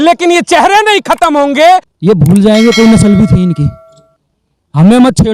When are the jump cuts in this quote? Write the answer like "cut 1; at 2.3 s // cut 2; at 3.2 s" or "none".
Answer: cut 1; at 1.9 s

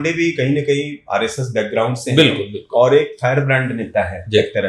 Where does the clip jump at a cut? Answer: none

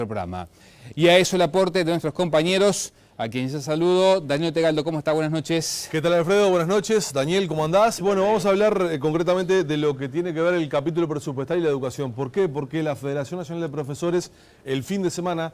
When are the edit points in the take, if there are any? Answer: none

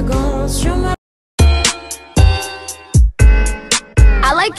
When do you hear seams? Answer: cut 1; at 1.0 s

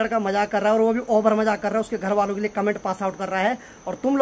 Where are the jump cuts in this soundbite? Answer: none

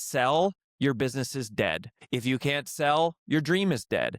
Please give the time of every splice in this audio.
cut 1; at 1.9 s

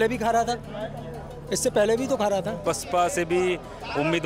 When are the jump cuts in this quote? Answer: cut 1; at 2.6 s

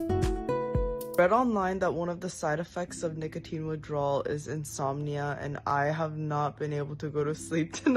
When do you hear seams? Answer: cut 1; at 1.1 s

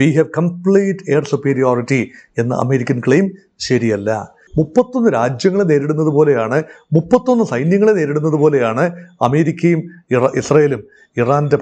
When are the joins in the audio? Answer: cut 1; at 4.4 s

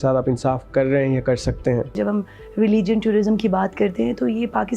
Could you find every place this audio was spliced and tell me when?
cut 1; at 2.0 s

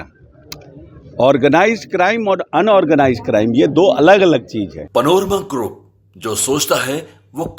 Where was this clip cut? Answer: cut 1; at 4.8 s

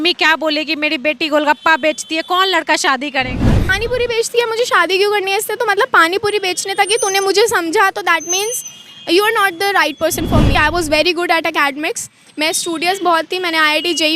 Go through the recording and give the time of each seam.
cut 1; at 3.7 s // cut 2; at 10.5 s

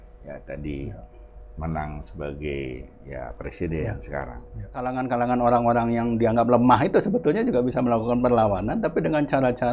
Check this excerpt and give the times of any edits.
cut 1; at 4.9 s

